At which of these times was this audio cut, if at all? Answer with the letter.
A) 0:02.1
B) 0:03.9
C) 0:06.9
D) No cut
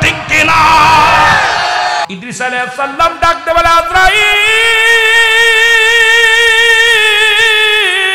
A